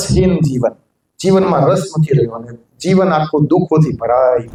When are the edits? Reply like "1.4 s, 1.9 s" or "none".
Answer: none